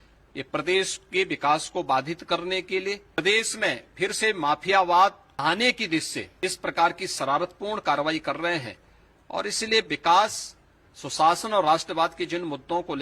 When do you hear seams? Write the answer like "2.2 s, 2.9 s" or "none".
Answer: 3.2 s, 5.3 s, 6.2 s